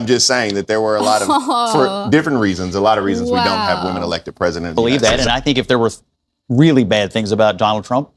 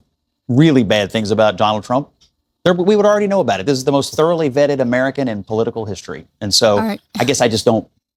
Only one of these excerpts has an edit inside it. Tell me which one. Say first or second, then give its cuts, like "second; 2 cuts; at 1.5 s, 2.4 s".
first; 1 cut; at 4.7 s